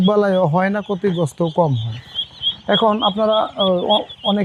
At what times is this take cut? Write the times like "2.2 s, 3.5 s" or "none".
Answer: none